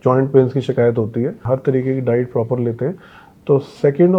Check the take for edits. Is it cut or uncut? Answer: cut